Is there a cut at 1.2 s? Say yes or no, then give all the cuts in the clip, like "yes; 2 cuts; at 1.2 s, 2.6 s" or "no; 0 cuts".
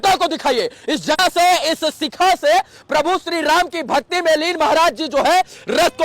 yes; 1 cut; at 1.2 s